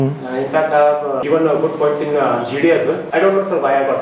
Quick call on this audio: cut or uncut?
cut